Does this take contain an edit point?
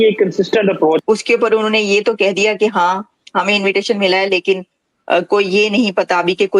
yes; 1 cut; at 1.0 s

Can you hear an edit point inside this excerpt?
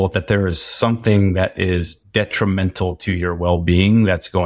no; 0 cuts

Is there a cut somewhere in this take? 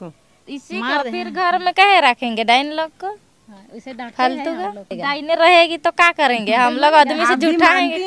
yes; 1 cut; at 4.9 s

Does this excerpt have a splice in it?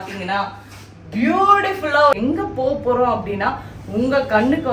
yes; 1 cut; at 2.2 s

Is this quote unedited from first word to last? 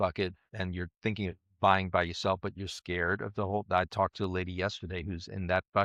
yes; 0 cuts

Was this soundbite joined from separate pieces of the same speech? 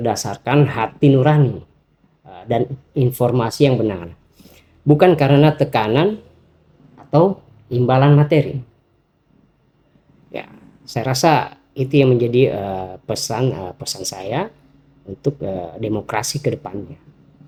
no; 0 cuts

